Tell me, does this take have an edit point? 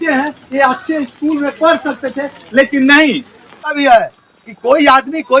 yes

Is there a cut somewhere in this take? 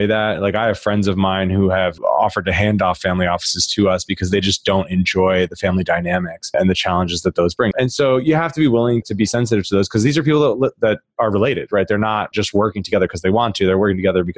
yes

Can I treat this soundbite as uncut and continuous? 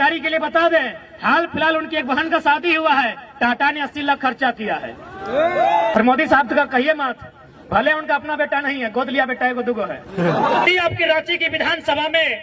no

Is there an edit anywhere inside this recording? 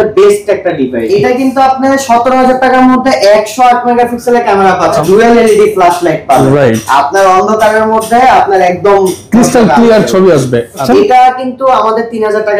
yes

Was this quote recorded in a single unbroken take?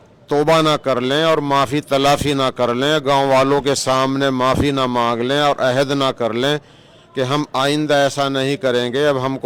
yes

